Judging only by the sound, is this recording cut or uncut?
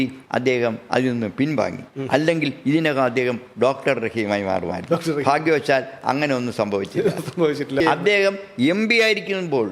cut